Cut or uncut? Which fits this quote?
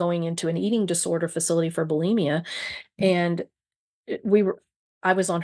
uncut